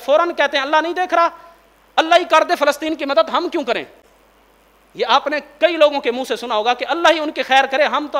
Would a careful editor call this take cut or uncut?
uncut